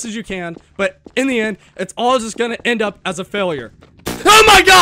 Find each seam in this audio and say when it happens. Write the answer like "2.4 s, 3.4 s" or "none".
none